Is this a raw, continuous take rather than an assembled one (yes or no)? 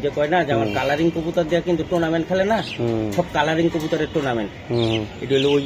yes